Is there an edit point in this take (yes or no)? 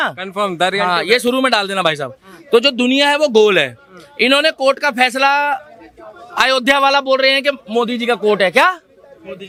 no